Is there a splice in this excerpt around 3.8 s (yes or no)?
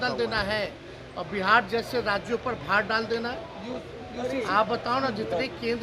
no